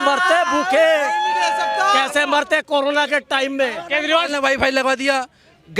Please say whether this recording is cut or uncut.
cut